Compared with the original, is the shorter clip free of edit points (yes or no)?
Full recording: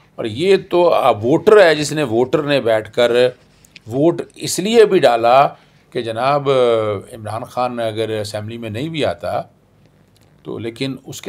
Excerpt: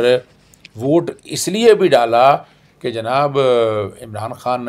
yes